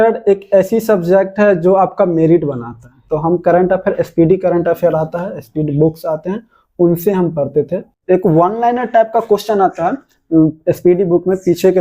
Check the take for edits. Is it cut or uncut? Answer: cut